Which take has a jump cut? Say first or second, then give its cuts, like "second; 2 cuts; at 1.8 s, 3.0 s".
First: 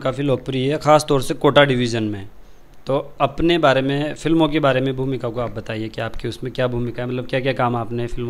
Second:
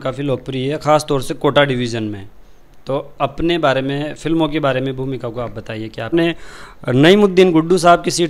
second; 1 cut; at 6.1 s